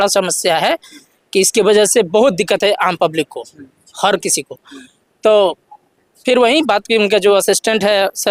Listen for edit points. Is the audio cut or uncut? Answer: uncut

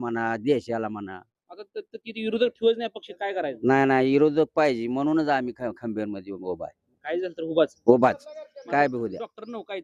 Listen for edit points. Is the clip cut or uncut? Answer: uncut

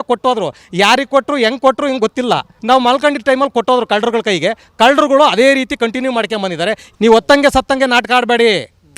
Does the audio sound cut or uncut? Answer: cut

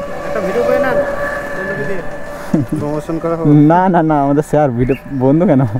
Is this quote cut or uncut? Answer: uncut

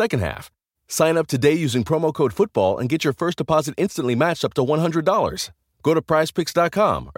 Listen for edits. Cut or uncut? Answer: uncut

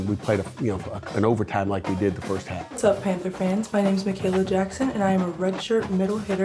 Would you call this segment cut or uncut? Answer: cut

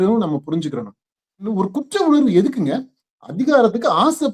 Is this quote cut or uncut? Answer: cut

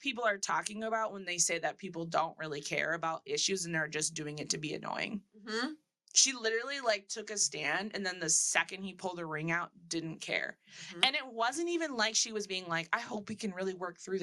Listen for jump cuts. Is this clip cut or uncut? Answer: uncut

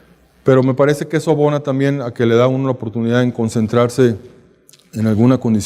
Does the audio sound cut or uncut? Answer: uncut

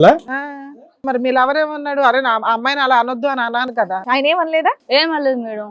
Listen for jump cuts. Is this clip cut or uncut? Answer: cut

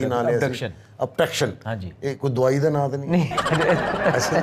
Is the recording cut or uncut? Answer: uncut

